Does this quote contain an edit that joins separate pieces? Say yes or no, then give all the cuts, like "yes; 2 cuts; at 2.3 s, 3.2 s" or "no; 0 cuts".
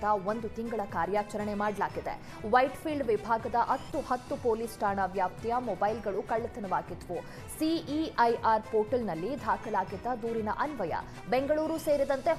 no; 0 cuts